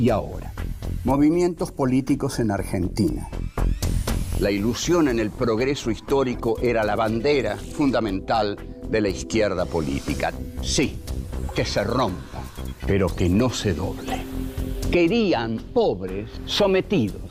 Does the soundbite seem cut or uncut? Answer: uncut